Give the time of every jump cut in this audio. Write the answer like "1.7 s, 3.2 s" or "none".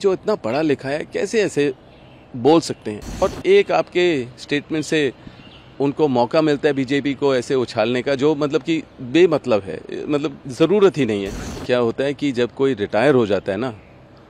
3.1 s, 11.5 s